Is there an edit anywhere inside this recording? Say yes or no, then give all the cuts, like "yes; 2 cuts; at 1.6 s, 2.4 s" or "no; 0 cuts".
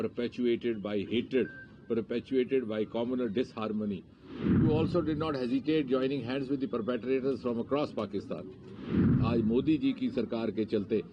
yes; 2 cuts; at 4.6 s, 9.0 s